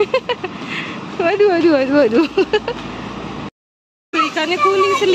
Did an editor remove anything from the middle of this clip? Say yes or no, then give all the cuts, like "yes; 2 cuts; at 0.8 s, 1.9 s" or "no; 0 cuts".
yes; 1 cut; at 4.1 s